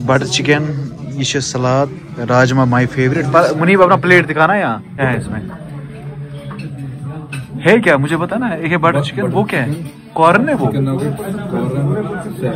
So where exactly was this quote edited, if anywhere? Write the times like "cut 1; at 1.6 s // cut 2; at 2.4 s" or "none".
cut 1; at 5.0 s